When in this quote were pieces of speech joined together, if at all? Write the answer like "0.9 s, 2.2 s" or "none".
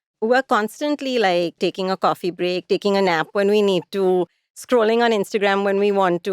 1.6 s